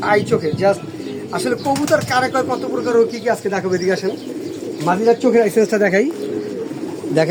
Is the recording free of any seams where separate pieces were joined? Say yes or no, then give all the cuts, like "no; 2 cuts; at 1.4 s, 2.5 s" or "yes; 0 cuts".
yes; 0 cuts